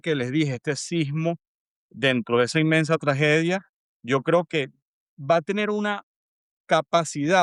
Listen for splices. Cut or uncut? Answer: uncut